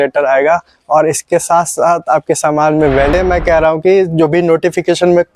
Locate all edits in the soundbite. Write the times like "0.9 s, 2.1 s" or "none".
3.1 s